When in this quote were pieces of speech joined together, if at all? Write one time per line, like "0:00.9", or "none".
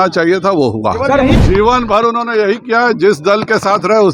none